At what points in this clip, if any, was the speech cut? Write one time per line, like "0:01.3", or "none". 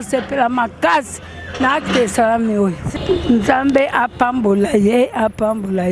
0:02.9